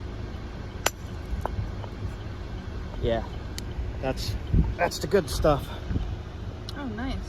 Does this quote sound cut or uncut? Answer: cut